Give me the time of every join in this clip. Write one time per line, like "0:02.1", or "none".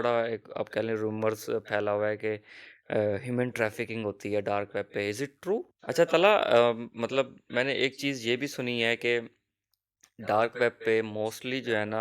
0:05.7